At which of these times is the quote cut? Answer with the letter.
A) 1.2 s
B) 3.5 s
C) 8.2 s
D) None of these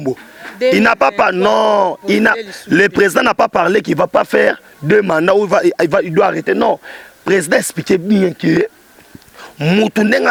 D